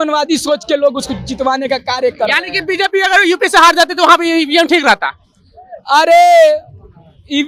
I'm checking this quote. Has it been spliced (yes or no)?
no